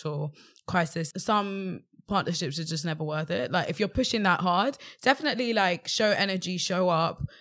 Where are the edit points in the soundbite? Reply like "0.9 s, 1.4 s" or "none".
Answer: 1.1 s